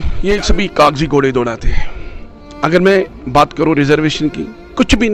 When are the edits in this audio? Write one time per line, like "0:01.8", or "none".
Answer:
none